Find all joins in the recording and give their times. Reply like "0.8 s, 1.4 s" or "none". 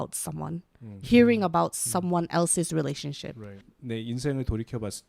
3.7 s